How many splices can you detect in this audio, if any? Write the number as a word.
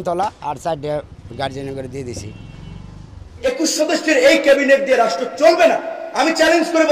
one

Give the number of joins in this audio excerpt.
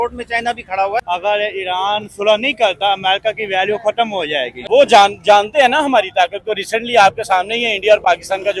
two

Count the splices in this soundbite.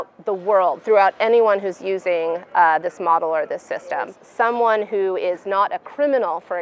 one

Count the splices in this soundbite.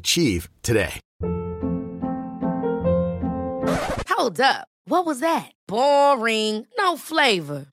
one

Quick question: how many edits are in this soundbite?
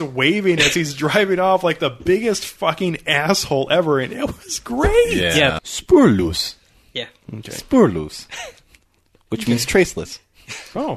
one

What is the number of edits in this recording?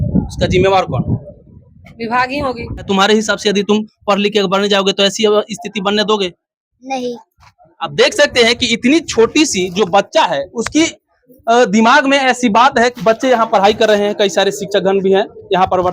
two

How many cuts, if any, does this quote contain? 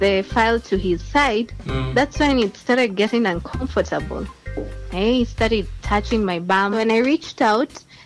one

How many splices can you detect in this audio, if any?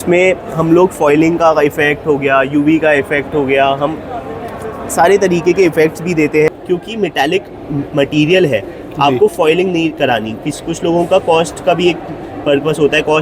one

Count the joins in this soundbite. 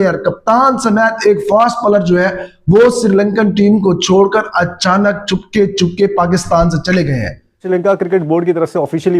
one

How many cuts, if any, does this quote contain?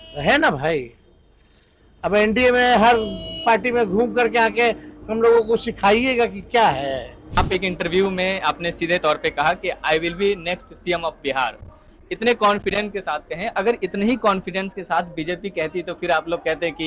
one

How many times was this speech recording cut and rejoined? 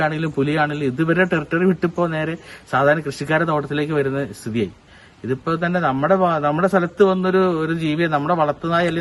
zero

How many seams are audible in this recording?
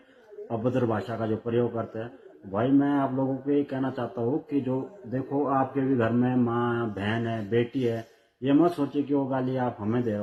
zero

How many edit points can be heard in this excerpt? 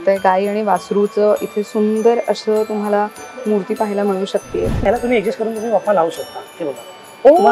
one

